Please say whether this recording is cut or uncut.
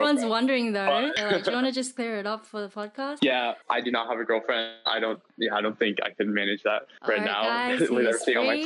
cut